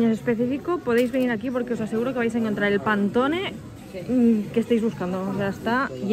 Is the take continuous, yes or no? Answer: yes